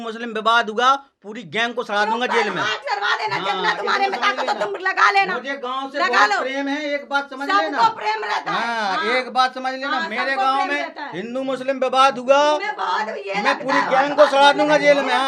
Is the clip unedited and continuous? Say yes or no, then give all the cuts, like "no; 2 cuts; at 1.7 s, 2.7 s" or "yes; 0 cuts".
yes; 0 cuts